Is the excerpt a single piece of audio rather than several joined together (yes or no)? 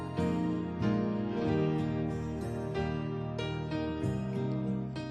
no